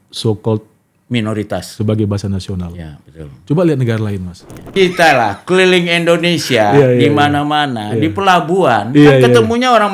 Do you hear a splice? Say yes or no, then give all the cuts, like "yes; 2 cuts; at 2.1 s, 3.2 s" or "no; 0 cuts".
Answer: yes; 1 cut; at 4.7 s